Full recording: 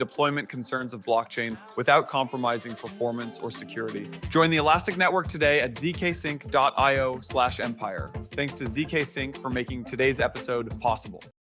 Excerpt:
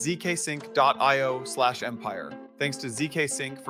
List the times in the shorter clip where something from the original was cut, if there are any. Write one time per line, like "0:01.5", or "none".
none